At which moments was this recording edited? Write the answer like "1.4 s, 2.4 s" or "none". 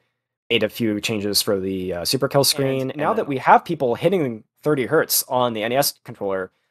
2.9 s